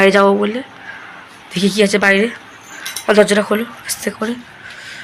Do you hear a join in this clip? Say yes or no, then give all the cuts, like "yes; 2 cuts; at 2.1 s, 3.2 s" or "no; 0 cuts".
no; 0 cuts